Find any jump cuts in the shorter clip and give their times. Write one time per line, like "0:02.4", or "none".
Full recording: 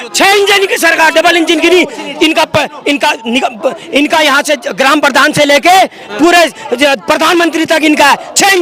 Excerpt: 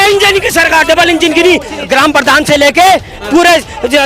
0:01.8

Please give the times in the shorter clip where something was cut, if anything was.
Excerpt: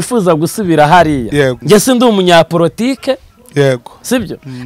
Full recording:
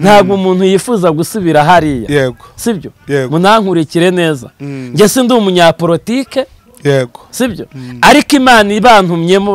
0:01.6

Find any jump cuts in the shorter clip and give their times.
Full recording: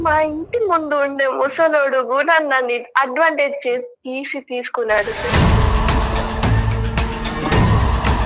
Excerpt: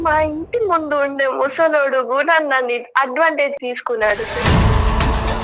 0:03.6

